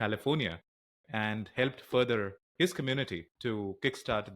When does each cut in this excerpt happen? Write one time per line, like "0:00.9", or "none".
0:02.4
0:03.3